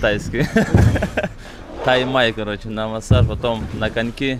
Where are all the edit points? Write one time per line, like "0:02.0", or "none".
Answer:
none